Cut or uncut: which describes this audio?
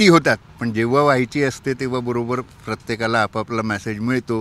uncut